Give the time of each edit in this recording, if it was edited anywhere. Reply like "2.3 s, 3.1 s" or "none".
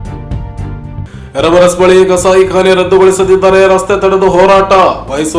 1.0 s

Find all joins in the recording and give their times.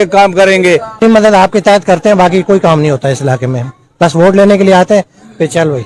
1.0 s

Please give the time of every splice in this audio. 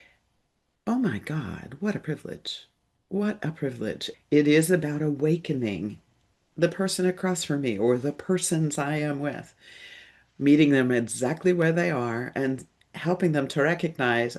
4.0 s

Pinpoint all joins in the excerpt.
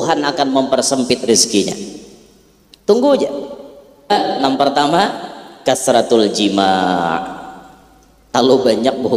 4.1 s

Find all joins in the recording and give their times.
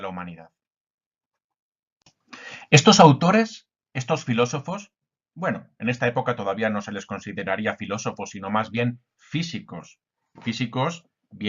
8.3 s

